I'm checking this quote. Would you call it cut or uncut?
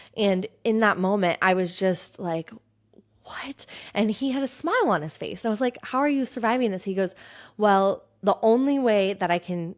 uncut